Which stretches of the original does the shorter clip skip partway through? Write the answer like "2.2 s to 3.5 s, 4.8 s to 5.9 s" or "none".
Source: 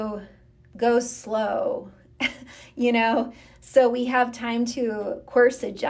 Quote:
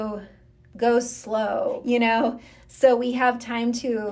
1.8 s to 2.7 s